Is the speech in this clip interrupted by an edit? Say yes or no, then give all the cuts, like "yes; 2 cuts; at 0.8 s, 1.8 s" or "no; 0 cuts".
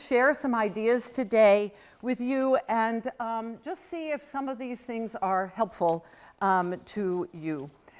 yes; 1 cut; at 7.0 s